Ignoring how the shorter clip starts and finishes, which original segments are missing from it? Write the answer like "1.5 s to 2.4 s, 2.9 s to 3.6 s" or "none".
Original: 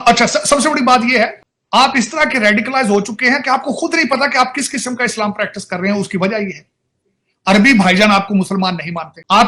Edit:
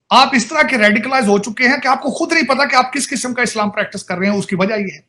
none